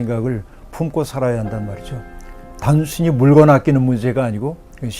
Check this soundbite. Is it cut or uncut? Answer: cut